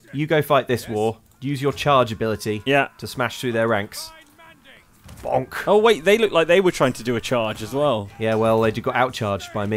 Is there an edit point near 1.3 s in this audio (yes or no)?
yes